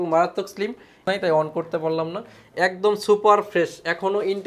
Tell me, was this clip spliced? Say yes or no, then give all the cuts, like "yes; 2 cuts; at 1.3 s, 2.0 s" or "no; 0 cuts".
yes; 1 cut; at 1.0 s